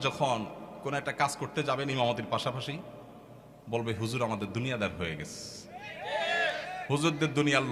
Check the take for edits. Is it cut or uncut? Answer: uncut